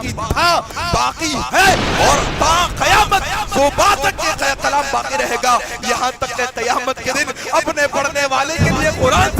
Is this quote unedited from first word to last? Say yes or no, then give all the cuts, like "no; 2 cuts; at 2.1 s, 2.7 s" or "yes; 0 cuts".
yes; 0 cuts